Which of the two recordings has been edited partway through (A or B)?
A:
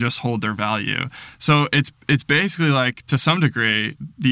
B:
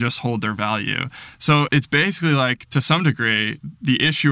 B